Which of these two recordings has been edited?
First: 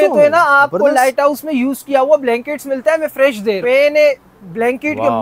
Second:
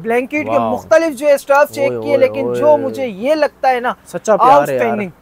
first; 1 cut; at 3.6 s

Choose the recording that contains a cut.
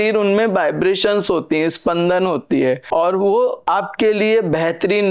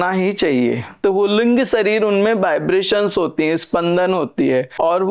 second; 1 cut; at 1.0 s

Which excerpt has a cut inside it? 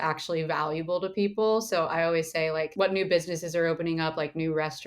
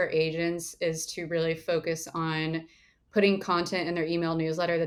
first; 1 cut; at 2.7 s

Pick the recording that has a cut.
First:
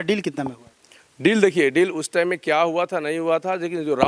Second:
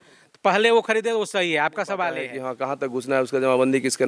second; 1 cut; at 2.4 s

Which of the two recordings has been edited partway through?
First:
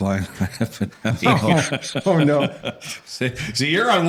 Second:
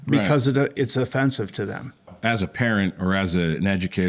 second; 1 cut; at 2.1 s

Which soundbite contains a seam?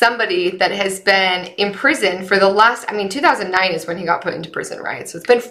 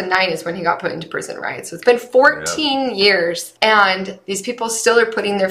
second; 1 cut; at 3.5 s

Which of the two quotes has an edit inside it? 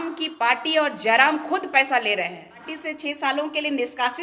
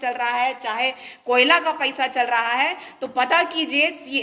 first; 1 cut; at 2.8 s

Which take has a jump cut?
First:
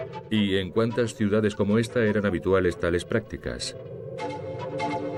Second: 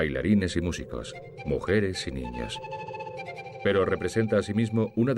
second; 1 cut; at 2.2 s

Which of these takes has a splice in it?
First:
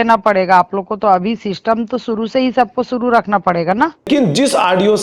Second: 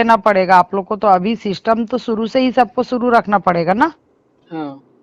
first; 1 cut; at 4.1 s

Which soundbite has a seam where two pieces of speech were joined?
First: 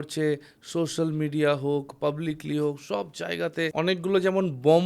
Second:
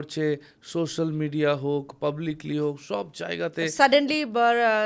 first; 1 cut; at 3.6 s

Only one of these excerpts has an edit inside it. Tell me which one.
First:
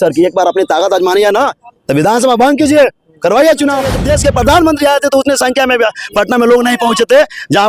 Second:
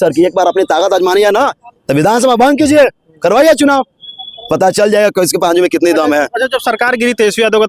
first; 1 cut; at 4.0 s

